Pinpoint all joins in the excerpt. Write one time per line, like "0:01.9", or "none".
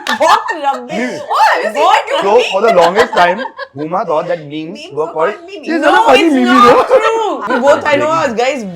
0:07.4